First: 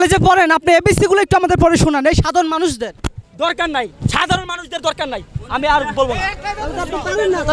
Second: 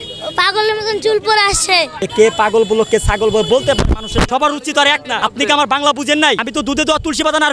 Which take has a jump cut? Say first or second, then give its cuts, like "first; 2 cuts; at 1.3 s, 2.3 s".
second; 4 cuts; at 2.0 s, 4.3 s, 5.2 s, 6.4 s